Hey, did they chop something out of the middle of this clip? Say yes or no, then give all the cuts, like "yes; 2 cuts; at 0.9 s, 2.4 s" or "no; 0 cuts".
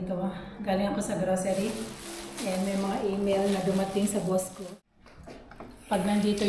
yes; 1 cut; at 4.6 s